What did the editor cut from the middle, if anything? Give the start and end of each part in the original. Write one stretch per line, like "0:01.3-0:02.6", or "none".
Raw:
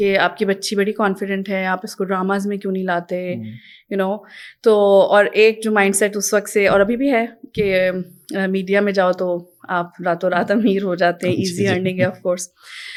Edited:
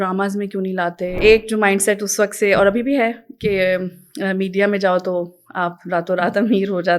0:03.3-0:05.3